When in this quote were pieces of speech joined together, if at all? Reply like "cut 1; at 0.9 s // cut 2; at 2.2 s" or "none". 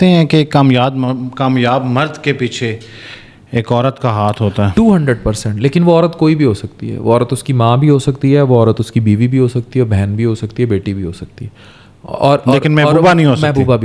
none